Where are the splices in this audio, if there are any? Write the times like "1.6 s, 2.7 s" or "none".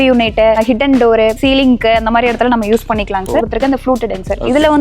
1.3 s, 3.4 s